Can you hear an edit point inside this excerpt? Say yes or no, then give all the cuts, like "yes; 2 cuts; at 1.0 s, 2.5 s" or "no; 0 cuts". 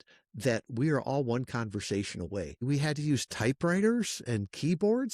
yes; 1 cut; at 2.6 s